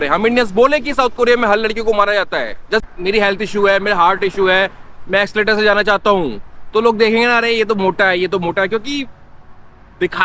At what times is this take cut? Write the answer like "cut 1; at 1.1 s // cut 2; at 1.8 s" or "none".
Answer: cut 1; at 2.9 s